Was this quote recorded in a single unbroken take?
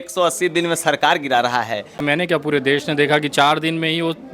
no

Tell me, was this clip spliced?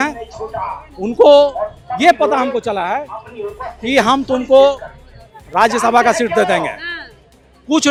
no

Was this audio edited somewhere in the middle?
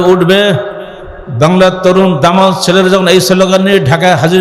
no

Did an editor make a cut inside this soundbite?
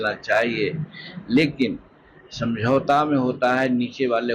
no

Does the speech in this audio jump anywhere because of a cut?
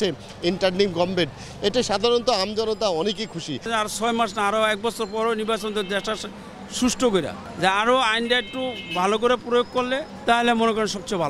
yes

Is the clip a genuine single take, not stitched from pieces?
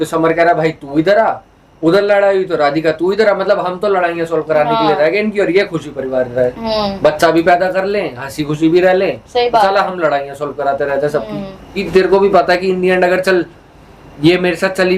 no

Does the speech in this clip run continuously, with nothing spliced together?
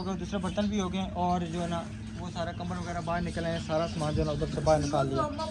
yes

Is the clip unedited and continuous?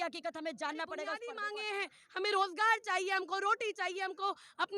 no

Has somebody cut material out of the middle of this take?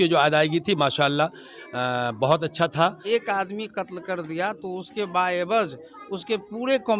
yes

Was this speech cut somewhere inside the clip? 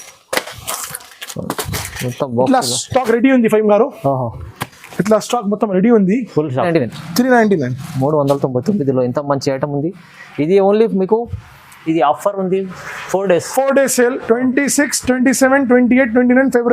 yes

